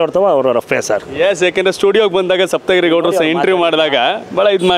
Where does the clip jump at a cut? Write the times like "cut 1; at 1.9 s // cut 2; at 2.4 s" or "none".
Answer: none